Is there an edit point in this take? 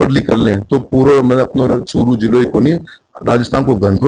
no; 0 cuts

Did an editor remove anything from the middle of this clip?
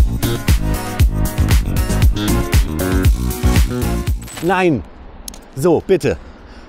yes; 1 cut; at 4.3 s

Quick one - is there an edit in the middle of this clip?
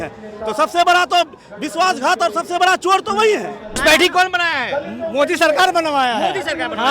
yes; 1 cut; at 3.8 s

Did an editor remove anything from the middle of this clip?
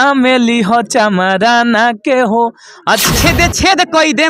yes; 1 cut; at 3.1 s

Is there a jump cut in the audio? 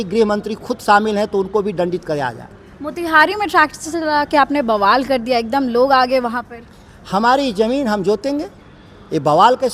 no; 0 cuts

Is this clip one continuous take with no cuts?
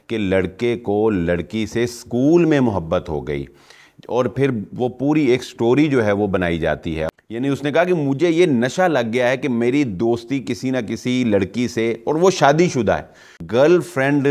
no; 2 cuts; at 7.0 s, 13.3 s

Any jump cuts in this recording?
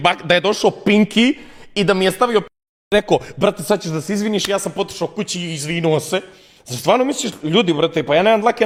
no; 0 cuts

